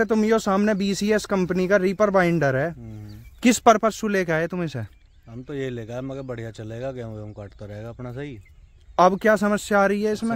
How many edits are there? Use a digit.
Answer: 0